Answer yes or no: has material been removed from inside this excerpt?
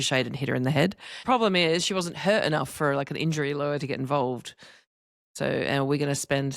yes